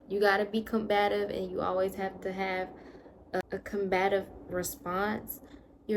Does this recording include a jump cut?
no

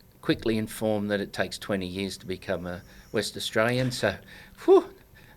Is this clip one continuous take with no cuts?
yes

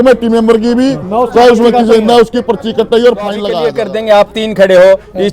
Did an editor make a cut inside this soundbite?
yes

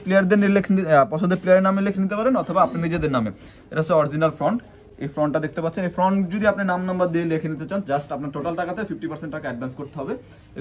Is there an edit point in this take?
no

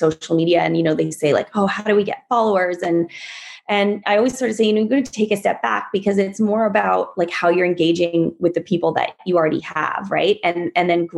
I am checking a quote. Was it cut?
no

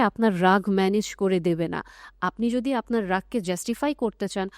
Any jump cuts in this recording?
no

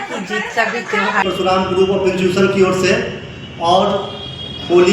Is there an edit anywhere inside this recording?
yes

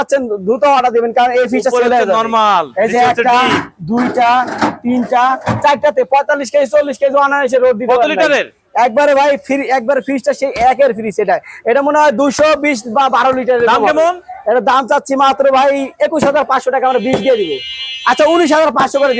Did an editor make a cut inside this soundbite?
no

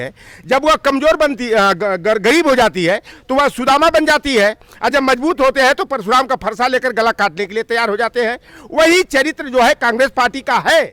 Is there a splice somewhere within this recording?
no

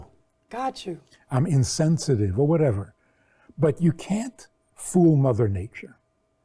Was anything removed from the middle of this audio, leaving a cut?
no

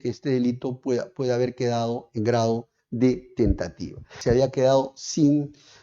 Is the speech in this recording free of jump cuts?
no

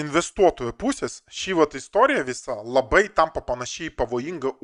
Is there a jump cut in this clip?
no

